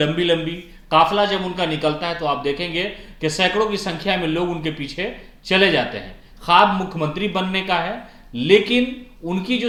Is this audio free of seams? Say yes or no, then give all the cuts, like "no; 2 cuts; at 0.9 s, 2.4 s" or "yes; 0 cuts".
yes; 0 cuts